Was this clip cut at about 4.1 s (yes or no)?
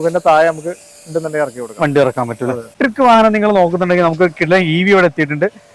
no